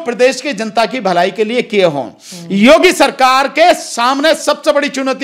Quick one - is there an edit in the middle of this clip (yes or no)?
no